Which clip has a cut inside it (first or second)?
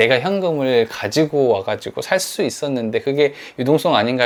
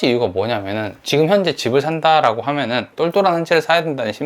second